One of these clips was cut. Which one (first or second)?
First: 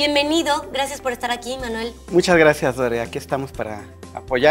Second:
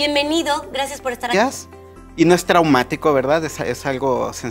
first